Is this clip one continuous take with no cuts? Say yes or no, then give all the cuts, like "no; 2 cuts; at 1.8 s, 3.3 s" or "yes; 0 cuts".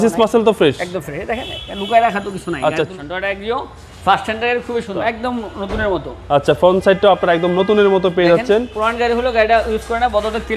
no; 2 cuts; at 3.0 s, 5.0 s